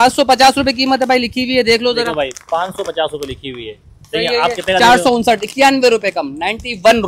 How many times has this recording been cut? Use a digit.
0